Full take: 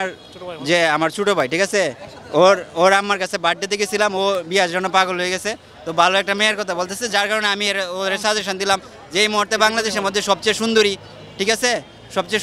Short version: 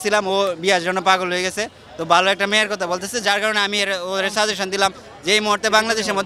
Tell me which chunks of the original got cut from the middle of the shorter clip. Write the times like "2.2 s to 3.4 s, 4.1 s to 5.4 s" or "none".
none